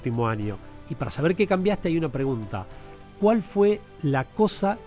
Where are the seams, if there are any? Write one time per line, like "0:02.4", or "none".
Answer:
none